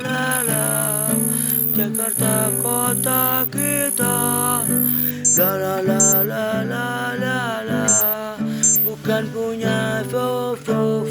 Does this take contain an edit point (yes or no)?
no